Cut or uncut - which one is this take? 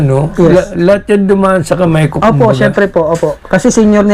uncut